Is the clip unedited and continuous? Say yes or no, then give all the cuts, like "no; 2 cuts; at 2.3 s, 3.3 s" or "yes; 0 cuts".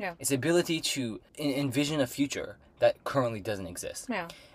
no; 1 cut; at 1.2 s